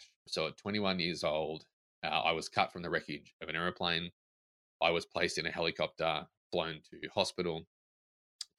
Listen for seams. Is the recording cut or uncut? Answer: uncut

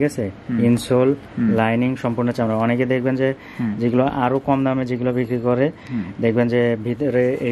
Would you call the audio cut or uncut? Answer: uncut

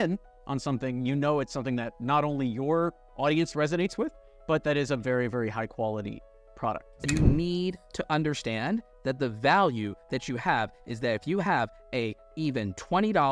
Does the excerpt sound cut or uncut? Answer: cut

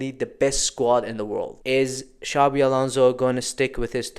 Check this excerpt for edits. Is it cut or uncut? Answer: cut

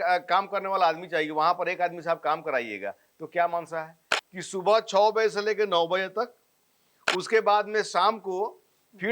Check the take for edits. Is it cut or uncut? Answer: cut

